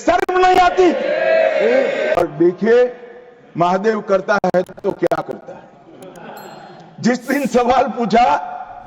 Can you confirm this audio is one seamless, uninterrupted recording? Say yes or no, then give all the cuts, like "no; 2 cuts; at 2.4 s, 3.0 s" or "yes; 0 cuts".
no; 1 cut; at 2.2 s